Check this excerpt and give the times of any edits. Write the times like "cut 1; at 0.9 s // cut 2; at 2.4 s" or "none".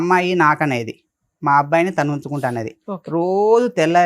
none